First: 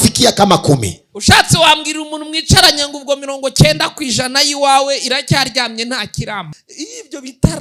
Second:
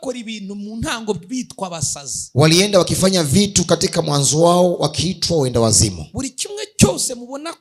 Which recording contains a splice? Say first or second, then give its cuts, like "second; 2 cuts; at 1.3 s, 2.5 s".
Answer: first; 1 cut; at 6.5 s